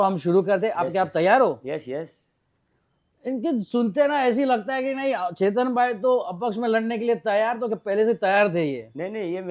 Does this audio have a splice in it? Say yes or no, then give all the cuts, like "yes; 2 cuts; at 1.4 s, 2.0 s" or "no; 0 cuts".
no; 0 cuts